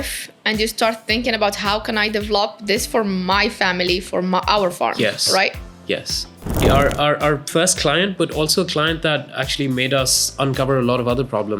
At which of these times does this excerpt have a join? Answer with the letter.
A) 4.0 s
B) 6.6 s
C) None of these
B